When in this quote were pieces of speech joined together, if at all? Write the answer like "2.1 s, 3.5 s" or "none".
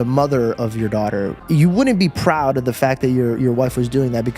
1.4 s